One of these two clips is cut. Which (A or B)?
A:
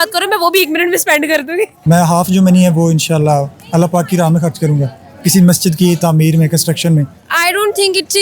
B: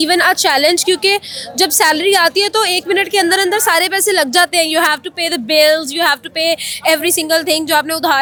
A